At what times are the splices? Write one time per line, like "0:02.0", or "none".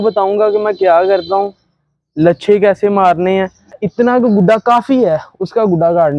0:03.7